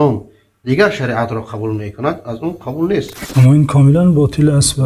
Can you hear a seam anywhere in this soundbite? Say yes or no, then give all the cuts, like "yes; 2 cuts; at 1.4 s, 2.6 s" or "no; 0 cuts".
yes; 1 cut; at 3.2 s